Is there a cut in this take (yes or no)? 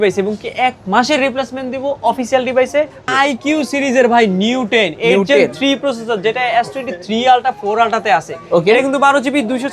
yes